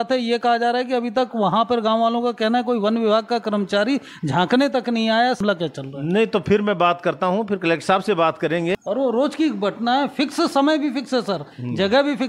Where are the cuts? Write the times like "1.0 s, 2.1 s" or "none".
5.4 s, 8.8 s